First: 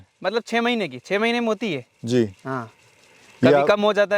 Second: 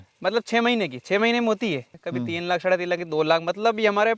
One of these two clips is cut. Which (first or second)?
second